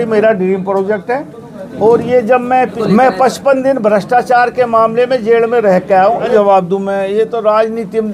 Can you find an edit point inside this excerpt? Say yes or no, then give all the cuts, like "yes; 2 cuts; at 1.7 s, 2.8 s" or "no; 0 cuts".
yes; 2 cuts; at 2.8 s, 6.3 s